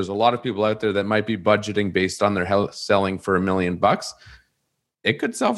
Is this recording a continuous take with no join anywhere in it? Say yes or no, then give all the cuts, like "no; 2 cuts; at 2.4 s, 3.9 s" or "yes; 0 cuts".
yes; 0 cuts